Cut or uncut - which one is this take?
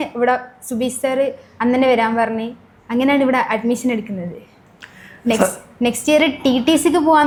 uncut